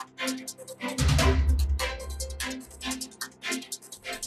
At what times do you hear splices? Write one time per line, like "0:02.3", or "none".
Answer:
0:01.2

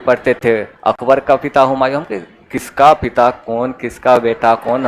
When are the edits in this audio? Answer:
none

